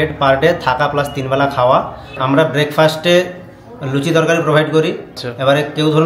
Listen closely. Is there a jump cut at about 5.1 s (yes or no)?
yes